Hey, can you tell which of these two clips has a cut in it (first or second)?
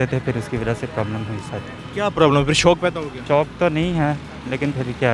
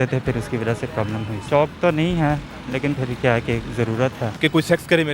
second